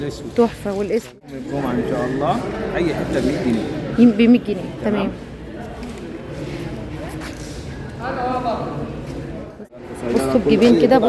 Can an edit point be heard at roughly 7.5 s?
no; 2 cuts; at 1.4 s, 9.6 s

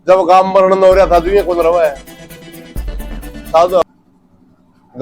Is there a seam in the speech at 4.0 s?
yes; 1 cut; at 4.0 s

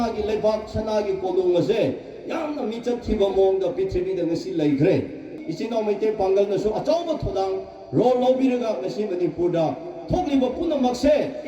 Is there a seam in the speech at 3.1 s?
no; 1 cut; at 5.3 s

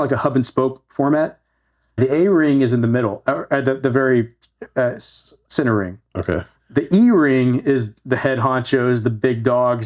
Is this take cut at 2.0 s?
yes; 2 cuts; at 2.0 s, 6.6 s

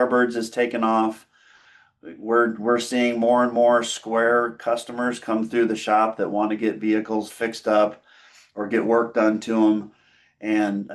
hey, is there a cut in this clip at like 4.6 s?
no; 0 cuts

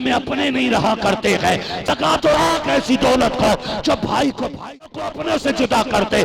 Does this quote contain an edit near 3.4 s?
no; 2 cuts; at 1.9 s, 4.9 s

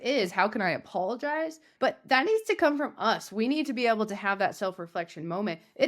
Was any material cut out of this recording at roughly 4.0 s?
no; 1 cut; at 1.7 s

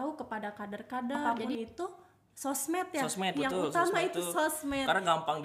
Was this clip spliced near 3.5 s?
no; 1 cut; at 1.2 s

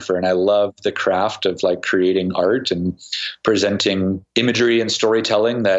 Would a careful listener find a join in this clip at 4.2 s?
yes; 1 cut; at 4.2 s

